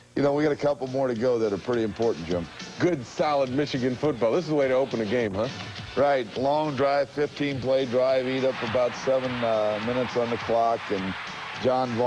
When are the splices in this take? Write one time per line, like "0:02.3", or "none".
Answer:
none